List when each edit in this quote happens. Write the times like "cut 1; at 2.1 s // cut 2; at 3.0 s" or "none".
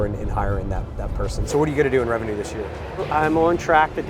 cut 1; at 1.4 s // cut 2; at 3.0 s